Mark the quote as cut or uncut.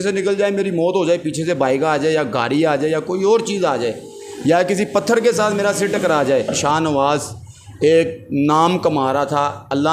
cut